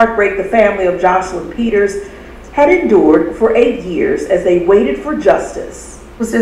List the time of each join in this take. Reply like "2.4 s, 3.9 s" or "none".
none